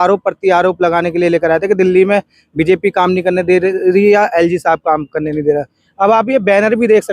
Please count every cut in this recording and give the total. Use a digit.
0